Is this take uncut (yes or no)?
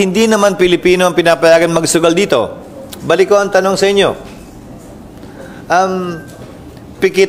yes